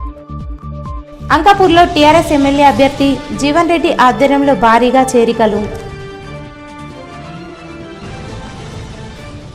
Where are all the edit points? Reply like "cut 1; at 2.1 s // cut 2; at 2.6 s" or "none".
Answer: none